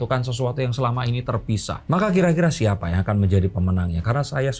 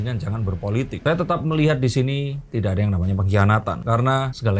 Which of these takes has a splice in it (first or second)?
first